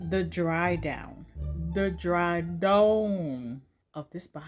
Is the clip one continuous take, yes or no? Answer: yes